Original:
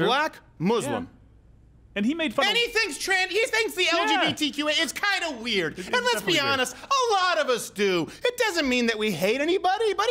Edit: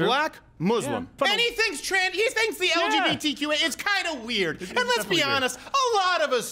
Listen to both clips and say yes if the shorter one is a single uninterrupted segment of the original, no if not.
no